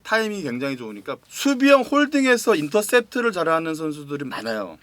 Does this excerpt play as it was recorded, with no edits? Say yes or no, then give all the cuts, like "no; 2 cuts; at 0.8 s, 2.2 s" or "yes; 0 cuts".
no; 1 cut; at 1.2 s